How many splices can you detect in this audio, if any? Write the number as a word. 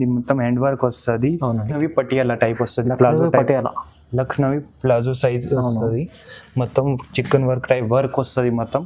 one